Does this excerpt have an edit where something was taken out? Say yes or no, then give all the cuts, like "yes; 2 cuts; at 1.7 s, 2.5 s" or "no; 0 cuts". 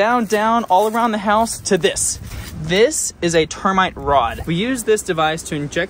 no; 0 cuts